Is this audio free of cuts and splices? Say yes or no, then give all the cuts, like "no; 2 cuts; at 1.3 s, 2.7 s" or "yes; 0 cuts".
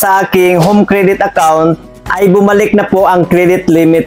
yes; 0 cuts